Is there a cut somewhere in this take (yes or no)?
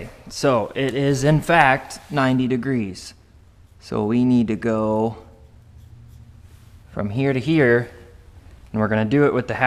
no